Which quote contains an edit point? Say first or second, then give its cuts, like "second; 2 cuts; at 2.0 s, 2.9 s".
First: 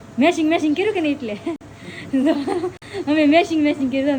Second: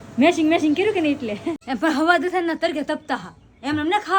second; 1 cut; at 1.6 s